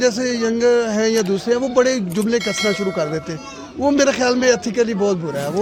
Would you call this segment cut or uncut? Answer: uncut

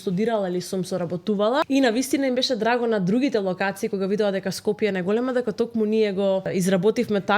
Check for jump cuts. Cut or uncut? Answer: cut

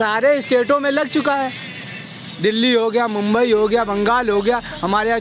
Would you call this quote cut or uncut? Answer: uncut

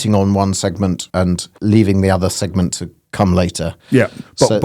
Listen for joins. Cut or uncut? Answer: cut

